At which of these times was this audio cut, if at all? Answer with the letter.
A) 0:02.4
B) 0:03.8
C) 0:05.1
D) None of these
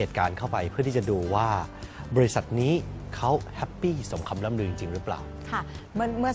D